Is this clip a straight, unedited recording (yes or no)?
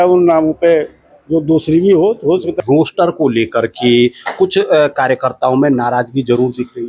no